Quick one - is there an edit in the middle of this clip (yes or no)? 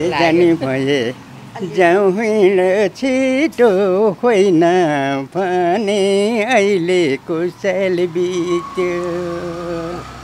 no